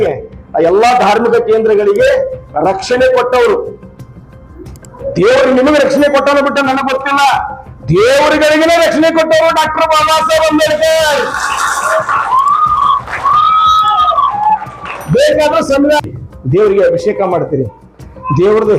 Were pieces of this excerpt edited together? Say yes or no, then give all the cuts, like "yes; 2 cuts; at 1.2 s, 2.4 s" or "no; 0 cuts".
yes; 1 cut; at 16.0 s